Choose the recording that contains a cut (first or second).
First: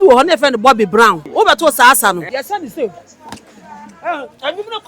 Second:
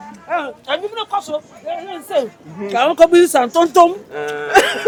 first